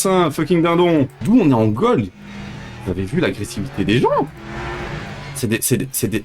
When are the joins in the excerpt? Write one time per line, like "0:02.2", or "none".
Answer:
0:01.2